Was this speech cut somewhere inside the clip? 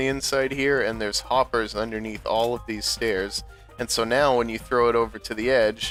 no; 0 cuts

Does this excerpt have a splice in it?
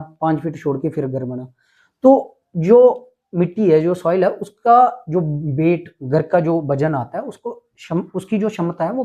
no; 0 cuts

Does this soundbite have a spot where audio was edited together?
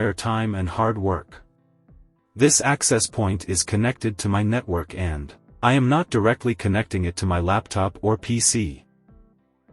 yes; 1 cut; at 8.8 s

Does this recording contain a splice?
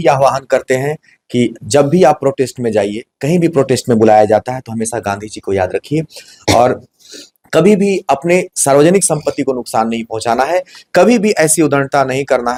no; 0 cuts

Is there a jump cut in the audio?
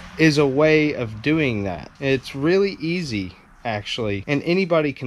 yes; 2 cuts; at 1.8 s, 4.2 s

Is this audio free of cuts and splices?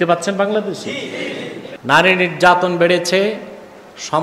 no; 1 cut; at 1.6 s

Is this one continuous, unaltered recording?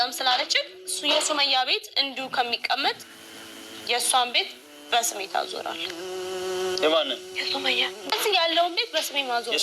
no; 1 cut; at 8.1 s

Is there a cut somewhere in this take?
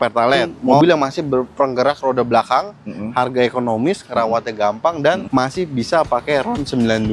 yes; 2 cuts; at 0.8 s, 5.2 s

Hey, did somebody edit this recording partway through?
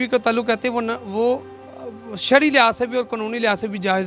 no; 0 cuts

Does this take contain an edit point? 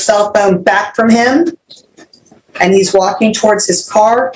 no; 0 cuts

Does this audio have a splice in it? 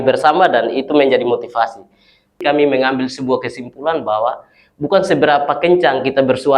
yes; 1 cut; at 2.4 s

